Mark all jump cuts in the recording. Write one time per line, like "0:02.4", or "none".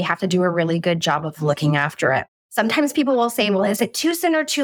0:02.4